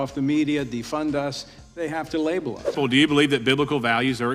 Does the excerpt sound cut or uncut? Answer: cut